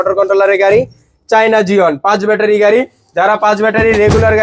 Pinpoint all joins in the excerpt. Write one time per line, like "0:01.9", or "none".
none

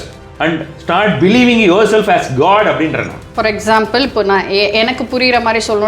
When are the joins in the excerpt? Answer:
0:03.2

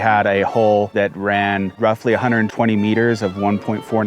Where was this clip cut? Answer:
0:00.9

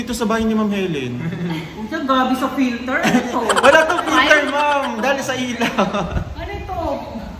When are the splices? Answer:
none

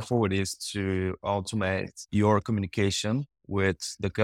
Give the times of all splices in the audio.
0:02.0

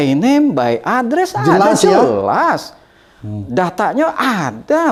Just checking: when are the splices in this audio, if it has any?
none

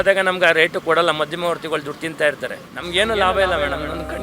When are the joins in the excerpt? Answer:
0:02.7

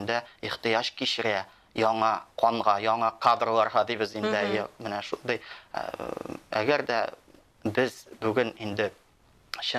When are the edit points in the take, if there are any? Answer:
none

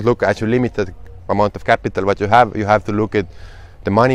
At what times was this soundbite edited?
none

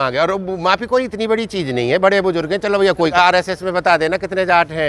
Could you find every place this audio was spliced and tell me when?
0:03.1

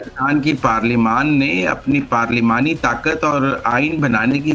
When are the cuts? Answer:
none

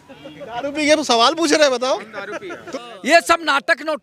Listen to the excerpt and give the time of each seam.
0:02.6

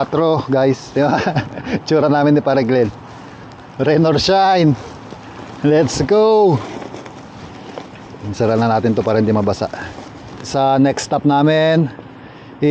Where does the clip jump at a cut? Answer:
0:10.5

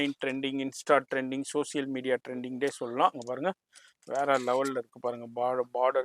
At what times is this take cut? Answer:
none

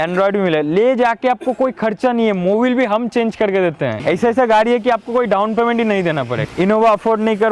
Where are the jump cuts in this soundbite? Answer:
0:04.0
0:06.4

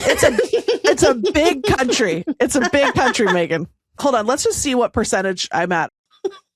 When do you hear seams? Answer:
0:03.9
0:05.7

